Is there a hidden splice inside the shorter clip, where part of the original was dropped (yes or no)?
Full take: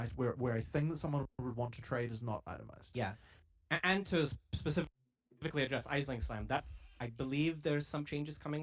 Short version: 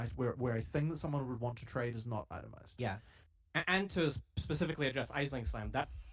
yes